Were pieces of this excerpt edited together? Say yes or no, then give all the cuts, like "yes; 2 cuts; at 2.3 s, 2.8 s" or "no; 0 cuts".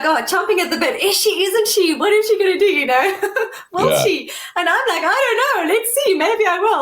no; 0 cuts